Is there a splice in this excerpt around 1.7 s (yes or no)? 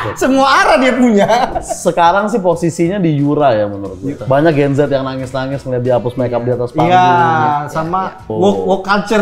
yes